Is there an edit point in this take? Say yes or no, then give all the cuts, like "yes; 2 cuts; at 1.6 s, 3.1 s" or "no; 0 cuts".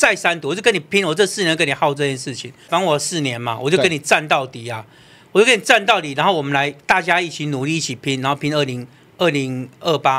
yes; 1 cut; at 2.7 s